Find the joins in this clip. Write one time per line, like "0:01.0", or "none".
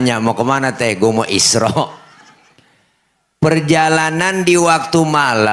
none